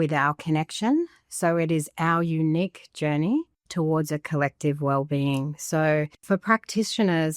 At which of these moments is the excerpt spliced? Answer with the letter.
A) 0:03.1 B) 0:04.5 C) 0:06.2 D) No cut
C